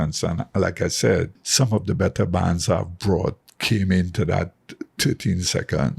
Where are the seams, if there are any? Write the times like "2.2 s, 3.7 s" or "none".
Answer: 1.4 s

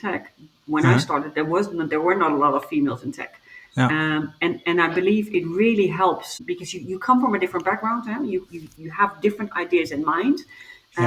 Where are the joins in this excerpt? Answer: 6.4 s

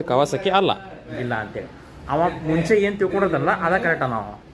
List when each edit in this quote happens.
1.1 s

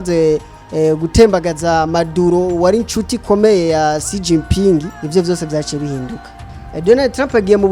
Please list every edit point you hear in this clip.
5.0 s

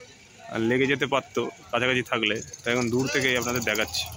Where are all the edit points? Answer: none

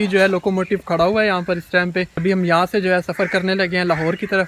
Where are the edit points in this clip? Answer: 2.2 s

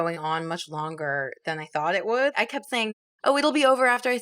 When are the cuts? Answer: 2.3 s

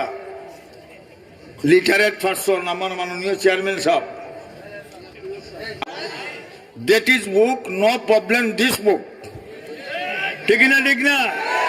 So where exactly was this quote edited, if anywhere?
5.8 s

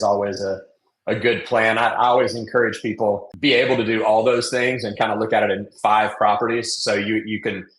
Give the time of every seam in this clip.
3.3 s

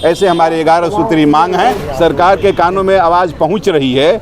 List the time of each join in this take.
1.8 s

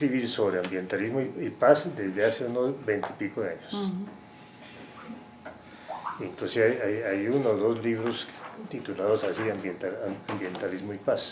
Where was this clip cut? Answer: 3.2 s

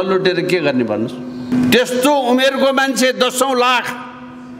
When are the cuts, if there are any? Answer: 1.5 s

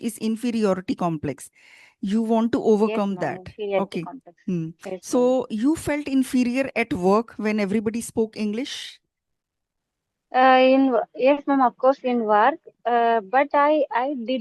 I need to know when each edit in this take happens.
none

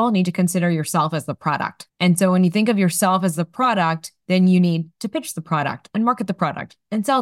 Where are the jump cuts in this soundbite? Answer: 1.8 s

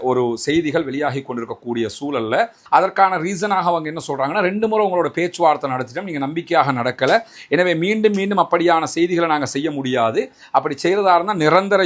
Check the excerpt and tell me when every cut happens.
2.6 s

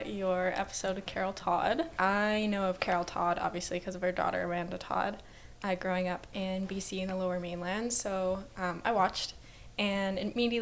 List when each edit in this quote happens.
1.9 s

